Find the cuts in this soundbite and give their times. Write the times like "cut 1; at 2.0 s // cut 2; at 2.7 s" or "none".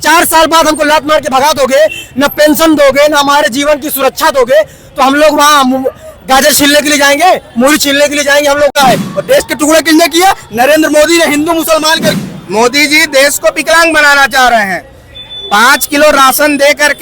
cut 1; at 8.7 s // cut 2; at 12.2 s